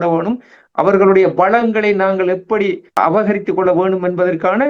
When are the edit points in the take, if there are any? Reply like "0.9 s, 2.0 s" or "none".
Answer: 3.0 s